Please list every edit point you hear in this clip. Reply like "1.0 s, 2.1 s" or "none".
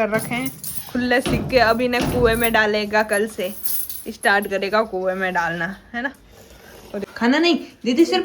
7.1 s